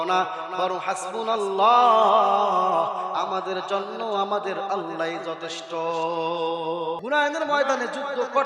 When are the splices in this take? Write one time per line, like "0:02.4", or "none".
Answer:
0:07.0